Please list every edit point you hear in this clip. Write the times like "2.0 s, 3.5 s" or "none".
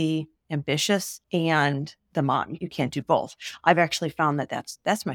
1.2 s, 2.6 s

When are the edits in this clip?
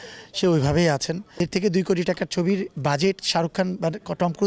1.4 s

